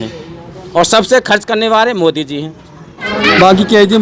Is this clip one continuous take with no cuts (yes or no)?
no